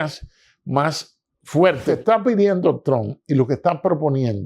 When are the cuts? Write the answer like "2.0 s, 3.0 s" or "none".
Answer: 2.0 s